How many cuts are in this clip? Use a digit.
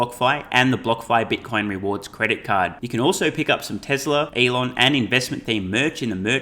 1